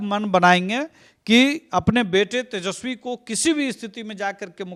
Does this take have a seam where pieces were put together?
no; 0 cuts

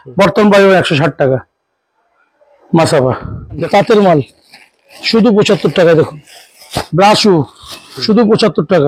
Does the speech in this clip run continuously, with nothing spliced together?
no; 1 cut; at 3.6 s

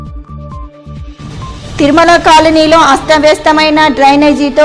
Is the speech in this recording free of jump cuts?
no; 1 cut; at 1.4 s

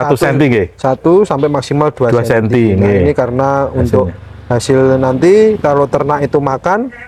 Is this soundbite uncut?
yes; 0 cuts

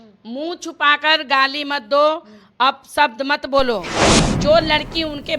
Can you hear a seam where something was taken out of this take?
yes; 1 cut; at 4.2 s

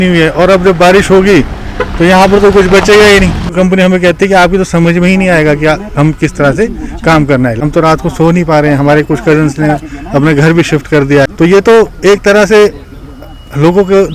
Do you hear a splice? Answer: yes; 3 cuts; at 3.5 s, 7.6 s, 11.3 s

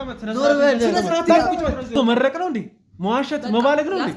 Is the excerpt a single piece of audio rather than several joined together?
no; 1 cut; at 1.9 s

